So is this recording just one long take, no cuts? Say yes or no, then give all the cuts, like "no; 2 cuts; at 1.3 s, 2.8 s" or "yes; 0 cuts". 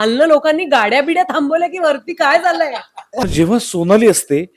no; 1 cut; at 3.3 s